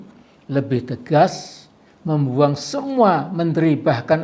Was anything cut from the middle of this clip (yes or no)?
no